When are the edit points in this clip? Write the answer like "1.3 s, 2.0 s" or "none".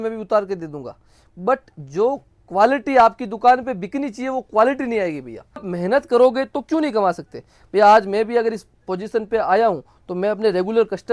5.7 s